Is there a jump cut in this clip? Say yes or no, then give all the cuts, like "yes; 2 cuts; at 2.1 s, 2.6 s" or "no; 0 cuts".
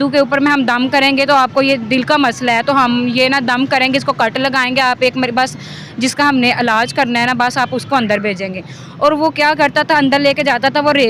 no; 0 cuts